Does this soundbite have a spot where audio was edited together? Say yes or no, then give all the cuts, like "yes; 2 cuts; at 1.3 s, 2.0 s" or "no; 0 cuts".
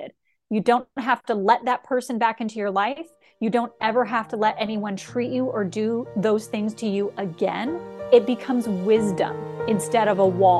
yes; 2 cuts; at 7.9 s, 9.7 s